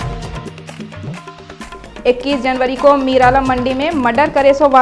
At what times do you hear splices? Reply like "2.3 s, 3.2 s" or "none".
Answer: 1.1 s

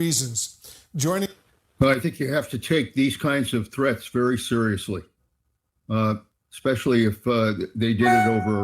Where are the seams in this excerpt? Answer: 1.3 s

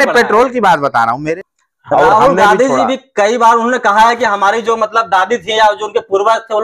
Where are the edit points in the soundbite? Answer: 1.3 s

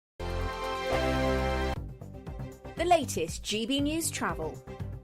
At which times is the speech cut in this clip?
1.8 s

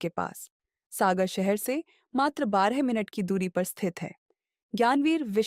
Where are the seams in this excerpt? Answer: none

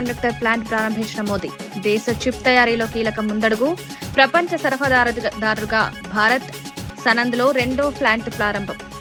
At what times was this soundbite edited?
none

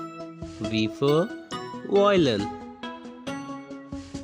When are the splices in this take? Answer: none

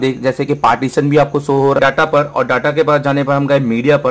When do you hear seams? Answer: 1.8 s

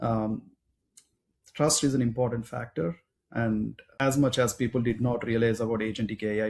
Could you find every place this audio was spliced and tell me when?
3.8 s

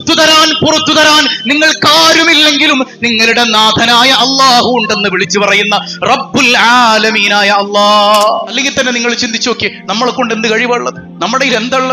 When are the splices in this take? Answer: 8.5 s

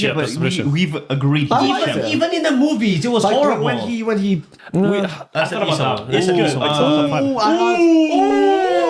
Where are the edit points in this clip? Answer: 4.6 s

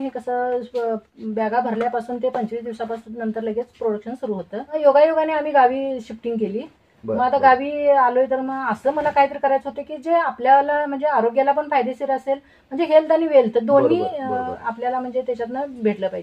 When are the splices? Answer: 4.7 s

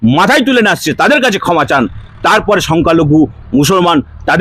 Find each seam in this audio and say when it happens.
none

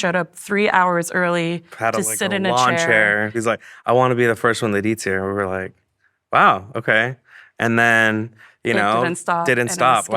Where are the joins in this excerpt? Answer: 3.4 s

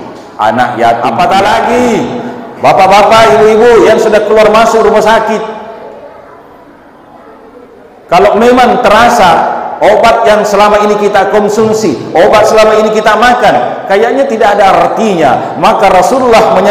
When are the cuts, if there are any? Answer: 1.0 s

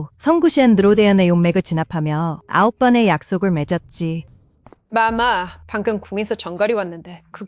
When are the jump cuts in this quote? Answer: 4.3 s

